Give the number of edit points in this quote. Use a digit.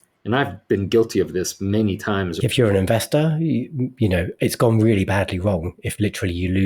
1